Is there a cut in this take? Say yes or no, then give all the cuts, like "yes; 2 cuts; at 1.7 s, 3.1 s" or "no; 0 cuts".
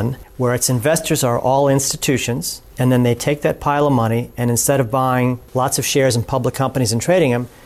no; 0 cuts